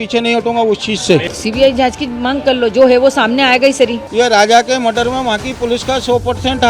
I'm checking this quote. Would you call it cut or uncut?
cut